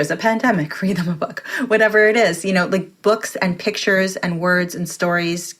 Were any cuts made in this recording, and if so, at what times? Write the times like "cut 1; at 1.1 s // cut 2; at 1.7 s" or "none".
cut 1; at 2.9 s